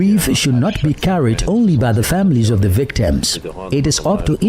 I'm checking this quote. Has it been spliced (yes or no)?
no